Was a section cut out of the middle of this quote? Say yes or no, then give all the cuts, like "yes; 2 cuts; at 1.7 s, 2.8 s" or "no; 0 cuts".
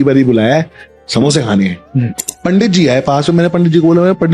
yes; 1 cut; at 2.2 s